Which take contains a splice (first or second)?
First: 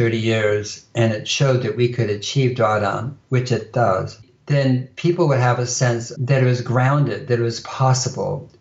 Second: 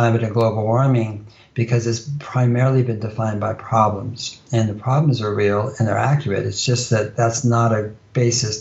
first